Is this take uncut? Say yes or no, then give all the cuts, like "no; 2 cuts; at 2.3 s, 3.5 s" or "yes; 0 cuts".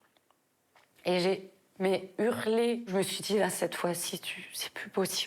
no; 1 cut; at 2.9 s